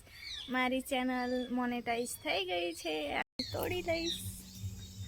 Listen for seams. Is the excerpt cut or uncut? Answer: cut